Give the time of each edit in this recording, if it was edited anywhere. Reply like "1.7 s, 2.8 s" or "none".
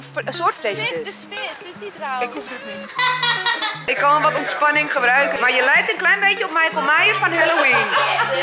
2.8 s, 3.9 s, 5.3 s